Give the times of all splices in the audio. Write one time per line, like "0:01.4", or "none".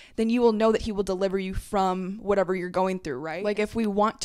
0:03.3